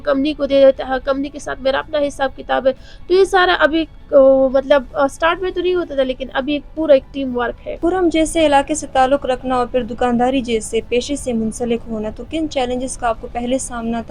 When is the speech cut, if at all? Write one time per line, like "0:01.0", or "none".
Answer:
0:07.8